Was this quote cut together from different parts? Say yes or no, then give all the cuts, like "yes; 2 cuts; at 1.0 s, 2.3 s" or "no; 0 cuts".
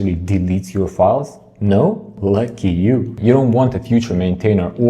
yes; 1 cut; at 3.1 s